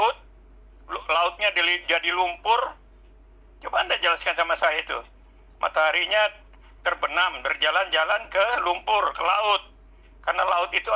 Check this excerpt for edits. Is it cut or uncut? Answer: uncut